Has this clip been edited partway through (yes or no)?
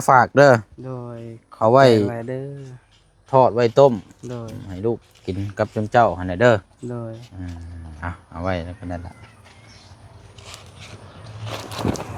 no